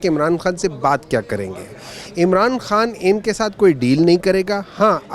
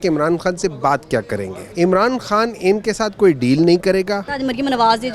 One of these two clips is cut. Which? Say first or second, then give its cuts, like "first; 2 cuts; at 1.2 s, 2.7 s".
second; 2 cuts; at 1.6 s, 4.3 s